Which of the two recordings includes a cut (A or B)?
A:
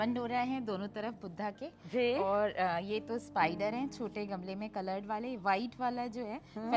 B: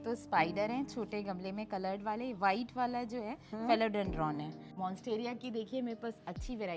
B